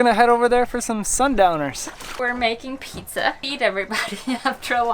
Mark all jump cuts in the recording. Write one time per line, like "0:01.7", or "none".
0:02.2
0:03.5